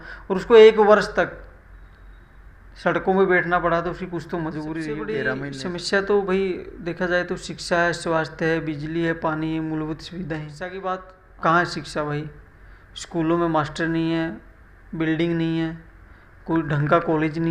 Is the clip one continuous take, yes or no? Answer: no